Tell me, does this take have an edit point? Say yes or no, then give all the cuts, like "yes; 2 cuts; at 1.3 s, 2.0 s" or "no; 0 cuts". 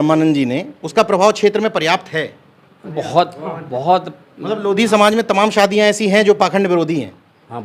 no; 0 cuts